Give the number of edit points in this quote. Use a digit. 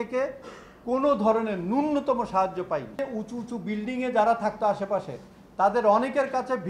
1